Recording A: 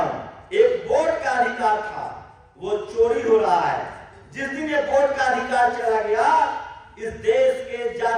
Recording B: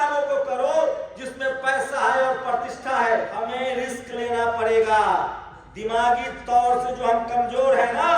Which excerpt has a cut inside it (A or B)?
B